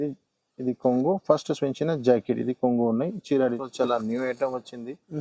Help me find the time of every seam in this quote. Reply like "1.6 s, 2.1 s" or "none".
3.6 s